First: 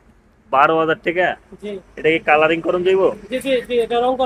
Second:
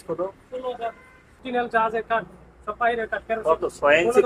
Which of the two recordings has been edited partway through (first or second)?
second